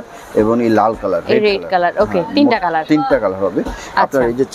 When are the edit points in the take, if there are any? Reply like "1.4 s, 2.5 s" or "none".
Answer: none